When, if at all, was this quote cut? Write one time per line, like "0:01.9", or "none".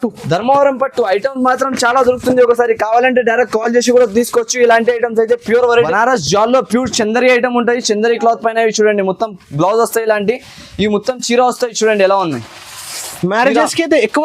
0:05.7